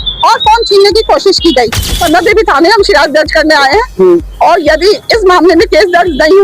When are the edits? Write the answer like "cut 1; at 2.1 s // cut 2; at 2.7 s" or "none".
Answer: cut 1; at 1.9 s

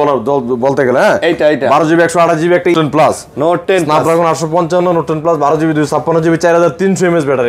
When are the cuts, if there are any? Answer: cut 1; at 2.7 s

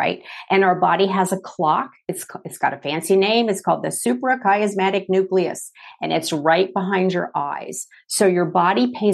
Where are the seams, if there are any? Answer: none

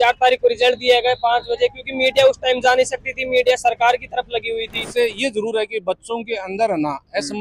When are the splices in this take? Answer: cut 1; at 4.9 s

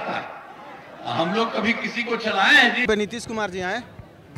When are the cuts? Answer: cut 1; at 2.9 s

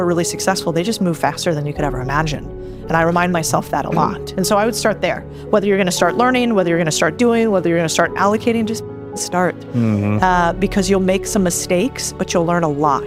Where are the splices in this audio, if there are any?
none

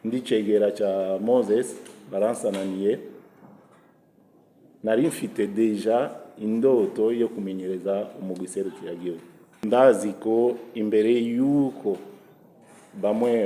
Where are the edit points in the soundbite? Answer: cut 1; at 9.6 s

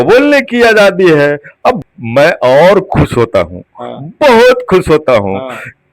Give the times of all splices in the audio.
cut 1; at 1.8 s

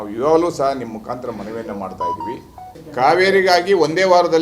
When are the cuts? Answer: cut 1; at 2.8 s

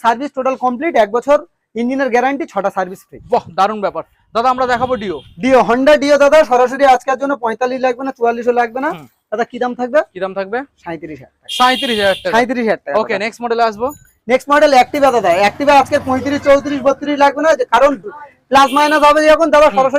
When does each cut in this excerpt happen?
none

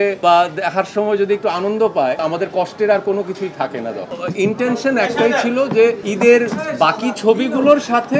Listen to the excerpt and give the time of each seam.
cut 1; at 2.2 s // cut 2; at 4.0 s // cut 3; at 6.1 s

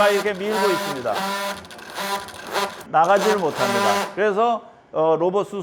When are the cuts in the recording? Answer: none

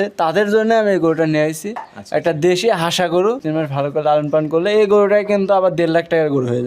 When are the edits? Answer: cut 1; at 3.4 s

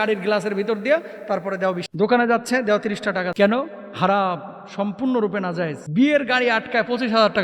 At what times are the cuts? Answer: cut 1; at 1.9 s // cut 2; at 3.3 s // cut 3; at 5.8 s

